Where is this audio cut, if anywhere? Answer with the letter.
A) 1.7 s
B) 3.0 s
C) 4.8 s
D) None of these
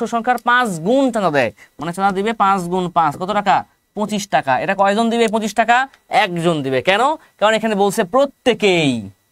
D